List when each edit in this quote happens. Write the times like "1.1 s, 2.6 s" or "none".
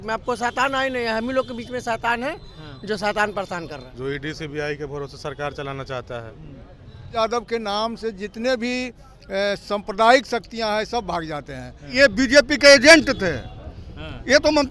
3.8 s, 7.1 s, 11.9 s